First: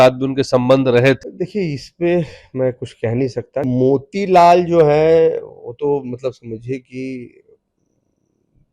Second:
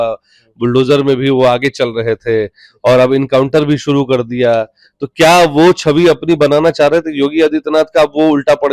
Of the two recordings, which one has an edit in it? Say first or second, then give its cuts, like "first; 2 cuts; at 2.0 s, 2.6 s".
first; 2 cuts; at 1.2 s, 3.7 s